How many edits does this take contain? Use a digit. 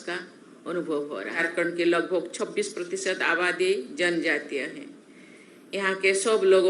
1